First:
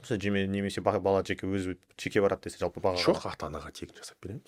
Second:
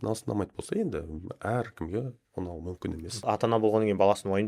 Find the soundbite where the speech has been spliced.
second; 1 cut; at 3.3 s

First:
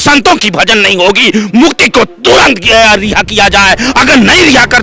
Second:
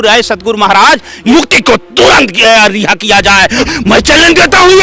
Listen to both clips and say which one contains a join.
second; 2 cuts; at 1.2 s, 3.7 s

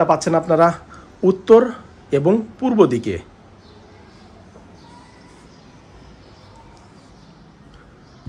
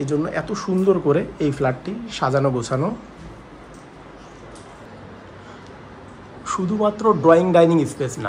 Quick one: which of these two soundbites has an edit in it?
second; 1 cut; at 4.8 s

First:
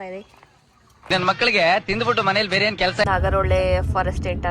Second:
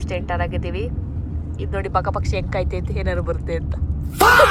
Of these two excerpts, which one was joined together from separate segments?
first; 1 cut; at 3.0 s

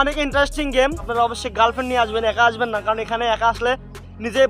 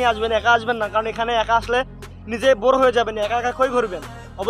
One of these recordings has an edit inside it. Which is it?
first; 1 cut; at 1.0 s

